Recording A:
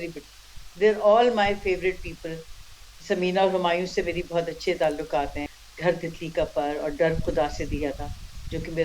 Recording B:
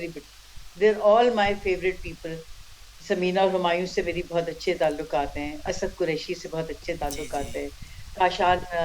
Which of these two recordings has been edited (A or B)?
A